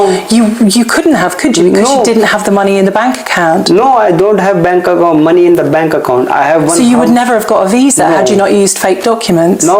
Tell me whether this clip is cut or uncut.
uncut